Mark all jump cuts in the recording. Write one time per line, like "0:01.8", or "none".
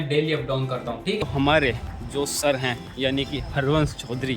0:01.2